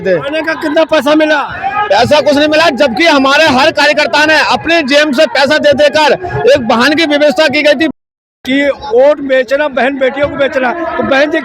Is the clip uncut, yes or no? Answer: no